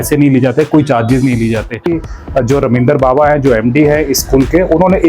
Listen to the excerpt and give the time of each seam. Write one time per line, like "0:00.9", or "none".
0:02.1